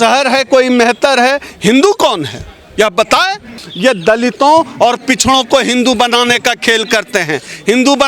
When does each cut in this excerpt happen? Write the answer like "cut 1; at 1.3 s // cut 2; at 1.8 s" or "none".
cut 1; at 3.6 s